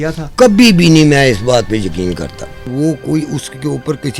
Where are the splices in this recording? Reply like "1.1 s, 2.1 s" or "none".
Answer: 2.7 s